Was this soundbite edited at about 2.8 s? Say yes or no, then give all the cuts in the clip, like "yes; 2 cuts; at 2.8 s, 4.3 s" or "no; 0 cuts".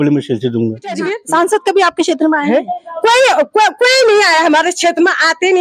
no; 1 cut; at 1.1 s